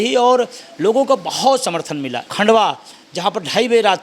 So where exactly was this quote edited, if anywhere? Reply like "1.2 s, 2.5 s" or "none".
2.2 s